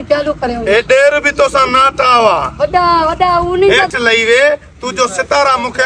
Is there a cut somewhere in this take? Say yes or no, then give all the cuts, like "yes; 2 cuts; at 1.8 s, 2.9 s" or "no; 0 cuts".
yes; 1 cut; at 3.8 s